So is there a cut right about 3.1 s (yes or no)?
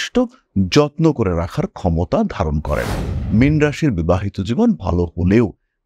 yes